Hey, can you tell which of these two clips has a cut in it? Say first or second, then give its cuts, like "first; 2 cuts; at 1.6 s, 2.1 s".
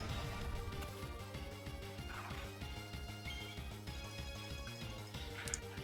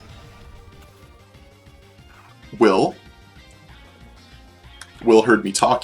second; 1 cut; at 2.3 s